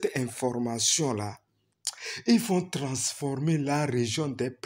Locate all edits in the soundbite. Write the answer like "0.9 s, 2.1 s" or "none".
none